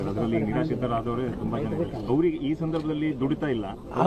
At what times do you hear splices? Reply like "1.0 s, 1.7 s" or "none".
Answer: none